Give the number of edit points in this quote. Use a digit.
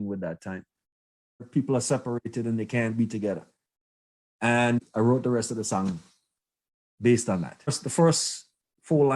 3